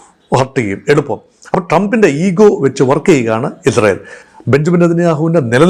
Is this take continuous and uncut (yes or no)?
yes